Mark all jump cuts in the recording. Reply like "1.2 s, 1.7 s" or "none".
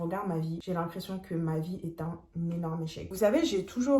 3.1 s